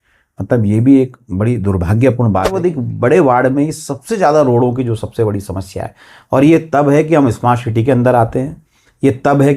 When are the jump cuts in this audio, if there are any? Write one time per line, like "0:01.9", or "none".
0:02.6